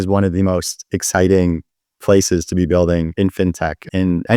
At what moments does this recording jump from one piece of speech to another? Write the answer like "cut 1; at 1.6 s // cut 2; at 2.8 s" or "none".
cut 1; at 3.4 s